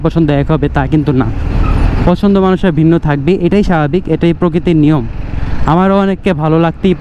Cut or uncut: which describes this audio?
uncut